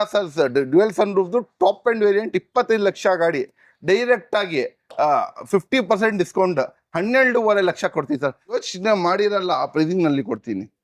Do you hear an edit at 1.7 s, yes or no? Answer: no